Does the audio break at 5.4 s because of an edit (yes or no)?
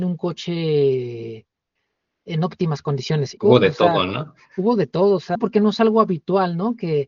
yes